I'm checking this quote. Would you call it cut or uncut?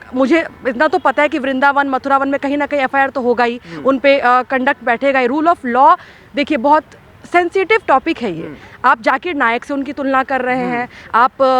uncut